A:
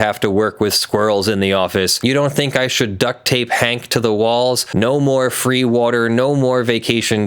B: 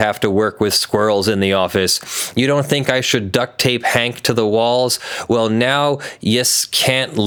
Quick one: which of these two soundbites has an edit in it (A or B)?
A